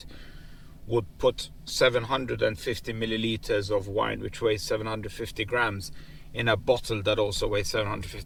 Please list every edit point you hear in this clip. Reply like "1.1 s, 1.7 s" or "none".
none